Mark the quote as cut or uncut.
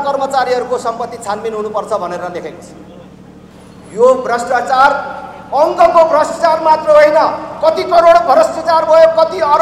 cut